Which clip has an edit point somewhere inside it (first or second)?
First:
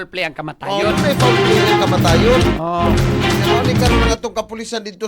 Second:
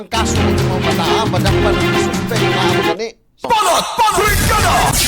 second